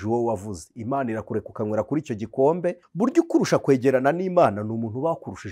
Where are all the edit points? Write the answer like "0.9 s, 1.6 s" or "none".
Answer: 2.8 s